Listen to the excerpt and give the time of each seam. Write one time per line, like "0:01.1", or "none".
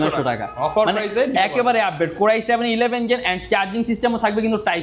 none

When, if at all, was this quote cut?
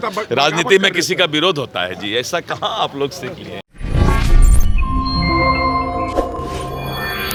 none

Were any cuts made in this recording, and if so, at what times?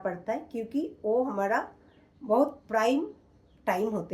none

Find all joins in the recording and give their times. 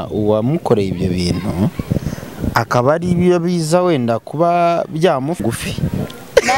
0:05.4

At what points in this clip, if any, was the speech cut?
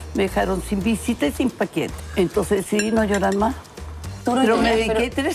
0:02.0
0:04.2

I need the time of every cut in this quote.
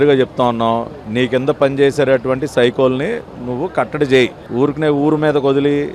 none

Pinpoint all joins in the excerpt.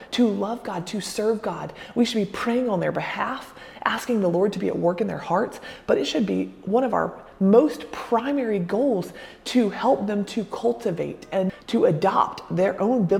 0:11.6

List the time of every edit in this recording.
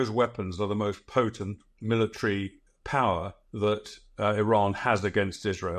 0:01.7
0:03.8

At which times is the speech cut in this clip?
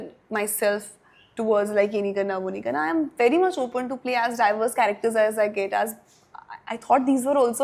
none

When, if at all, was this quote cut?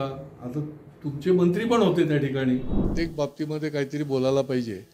0:02.8

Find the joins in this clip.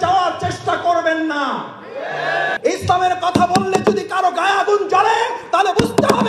0:02.6

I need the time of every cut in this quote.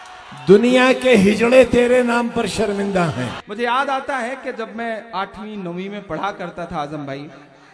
0:03.3

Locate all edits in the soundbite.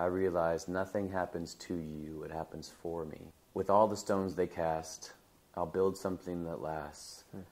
0:03.3

